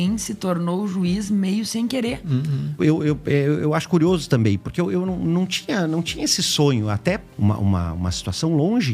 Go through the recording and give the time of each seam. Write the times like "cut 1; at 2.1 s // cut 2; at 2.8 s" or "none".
cut 1; at 2.7 s // cut 2; at 7.3 s